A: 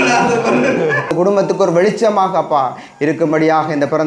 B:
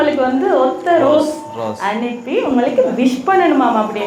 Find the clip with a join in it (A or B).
A